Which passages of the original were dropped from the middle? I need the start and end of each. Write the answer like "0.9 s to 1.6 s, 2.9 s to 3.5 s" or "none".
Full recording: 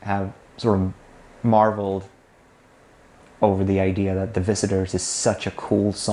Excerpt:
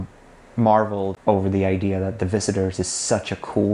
2.0 s to 3.3 s